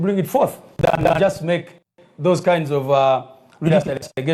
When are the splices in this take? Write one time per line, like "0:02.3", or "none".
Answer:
0:01.0